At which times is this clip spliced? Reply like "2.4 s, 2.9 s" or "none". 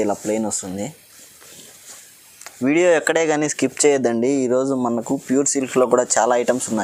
none